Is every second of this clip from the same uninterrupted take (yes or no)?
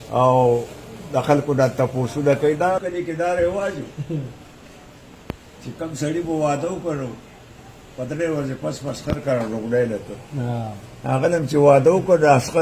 no